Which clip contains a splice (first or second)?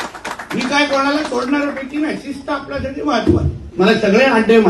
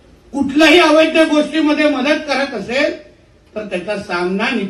first